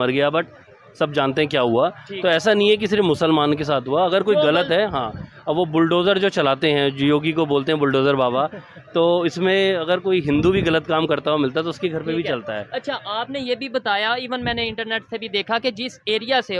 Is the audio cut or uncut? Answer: uncut